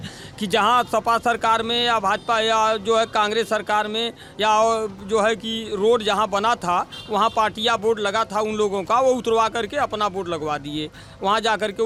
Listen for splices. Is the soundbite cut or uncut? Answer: uncut